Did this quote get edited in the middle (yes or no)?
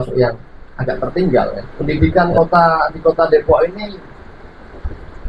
yes